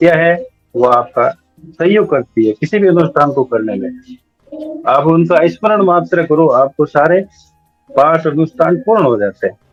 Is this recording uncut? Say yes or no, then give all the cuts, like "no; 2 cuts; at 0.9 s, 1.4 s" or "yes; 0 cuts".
yes; 0 cuts